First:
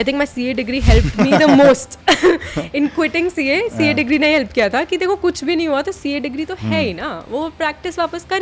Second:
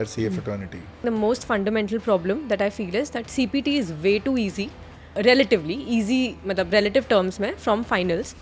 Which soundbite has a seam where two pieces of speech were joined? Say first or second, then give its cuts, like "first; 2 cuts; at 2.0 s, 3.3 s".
second; 2 cuts; at 1.0 s, 5.1 s